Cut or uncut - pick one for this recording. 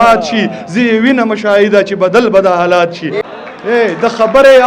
cut